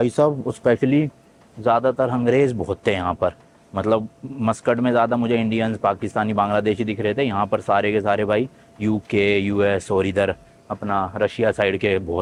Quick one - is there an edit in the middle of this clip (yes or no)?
no